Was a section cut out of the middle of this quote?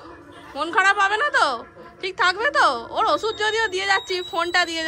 no; 0 cuts

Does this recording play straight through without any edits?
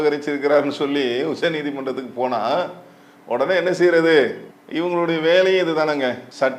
yes; 0 cuts

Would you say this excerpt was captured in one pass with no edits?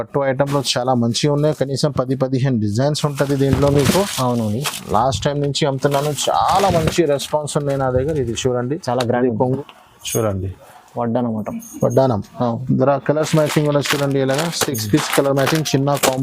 no; 1 cut; at 9.6 s

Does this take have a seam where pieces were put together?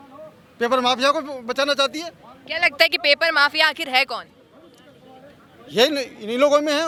no; 0 cuts

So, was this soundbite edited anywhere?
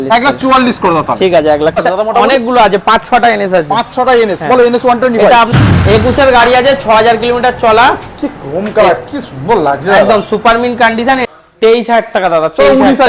yes; 3 cuts; at 1.8 s, 5.5 s, 11.2 s

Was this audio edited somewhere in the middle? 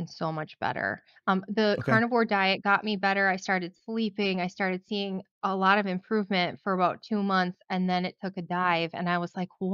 no; 0 cuts

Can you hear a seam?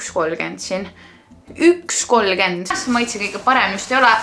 yes; 1 cut; at 2.8 s

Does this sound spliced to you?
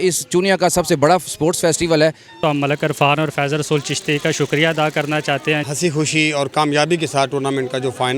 yes; 2 cuts; at 2.3 s, 5.6 s

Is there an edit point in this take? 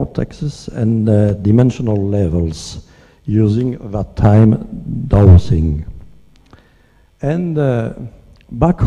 yes; 1 cut; at 2.1 s

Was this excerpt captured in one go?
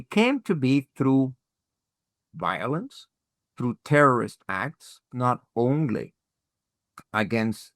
no; 1 cut; at 5.1 s

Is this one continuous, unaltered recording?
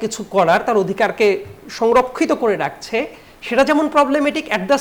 yes; 0 cuts

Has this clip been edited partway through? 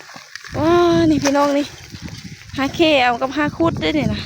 no; 0 cuts

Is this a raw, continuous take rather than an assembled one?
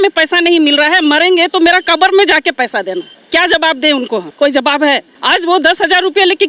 no; 3 cuts; at 3.1 s, 4.3 s, 5.1 s

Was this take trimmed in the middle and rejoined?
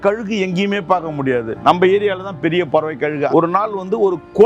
yes; 2 cuts; at 1.5 s, 3.3 s

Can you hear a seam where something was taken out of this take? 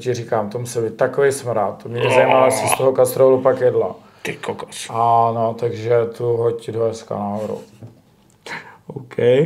no; 0 cuts

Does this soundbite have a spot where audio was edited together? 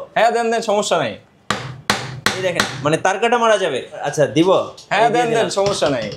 yes; 1 cut; at 4.0 s

